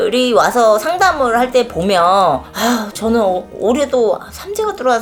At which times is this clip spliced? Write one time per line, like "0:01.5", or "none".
none